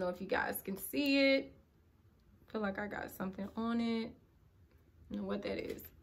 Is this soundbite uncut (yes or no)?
yes